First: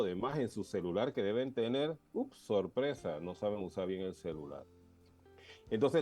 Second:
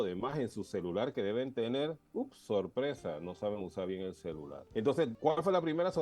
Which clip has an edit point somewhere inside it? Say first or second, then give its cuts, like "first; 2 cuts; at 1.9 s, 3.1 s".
second; 2 cuts; at 4.6 s, 5.1 s